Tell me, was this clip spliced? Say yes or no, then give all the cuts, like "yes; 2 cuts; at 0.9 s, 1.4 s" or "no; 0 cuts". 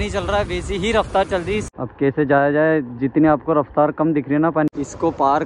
yes; 2 cuts; at 1.7 s, 4.7 s